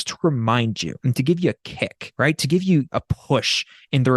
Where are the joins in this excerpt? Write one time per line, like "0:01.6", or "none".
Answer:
0:00.9
0:02.0
0:02.9